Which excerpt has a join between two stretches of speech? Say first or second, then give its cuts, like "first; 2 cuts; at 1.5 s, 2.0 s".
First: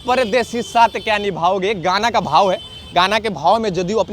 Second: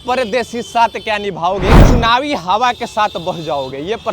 second; 1 cut; at 1.8 s